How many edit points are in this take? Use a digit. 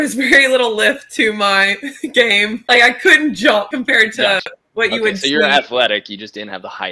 2